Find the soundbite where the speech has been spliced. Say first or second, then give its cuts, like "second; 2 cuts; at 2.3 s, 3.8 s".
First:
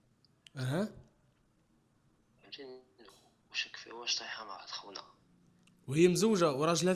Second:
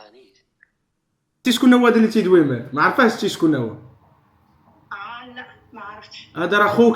second; 1 cut; at 1.3 s